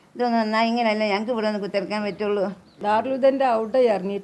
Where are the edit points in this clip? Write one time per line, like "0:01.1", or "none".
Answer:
0:02.7